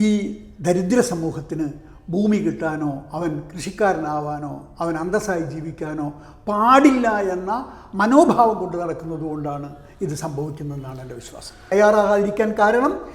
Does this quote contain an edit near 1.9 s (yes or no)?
no